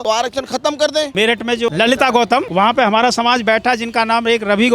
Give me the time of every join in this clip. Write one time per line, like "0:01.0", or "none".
0:01.1